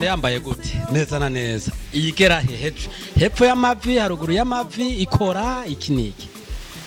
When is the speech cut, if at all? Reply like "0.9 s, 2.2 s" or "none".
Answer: none